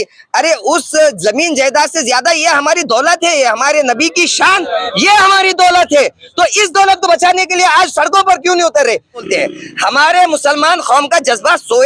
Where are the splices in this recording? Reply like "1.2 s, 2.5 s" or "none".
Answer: 9.2 s